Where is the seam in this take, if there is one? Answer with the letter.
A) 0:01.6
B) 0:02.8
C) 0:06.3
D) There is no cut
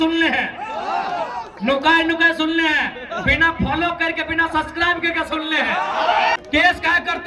C